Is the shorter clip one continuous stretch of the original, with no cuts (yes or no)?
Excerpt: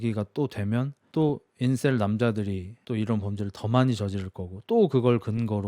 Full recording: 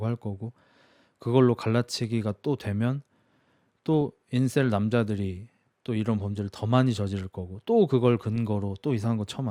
no